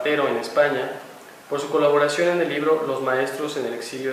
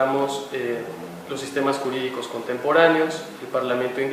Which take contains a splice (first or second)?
second